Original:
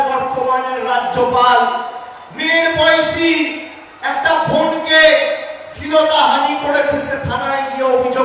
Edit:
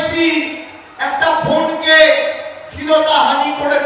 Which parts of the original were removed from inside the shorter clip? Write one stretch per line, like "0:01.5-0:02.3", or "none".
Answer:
none